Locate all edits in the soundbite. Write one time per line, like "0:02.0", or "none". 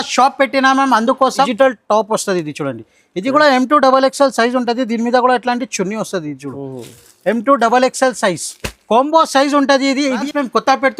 0:01.5
0:10.2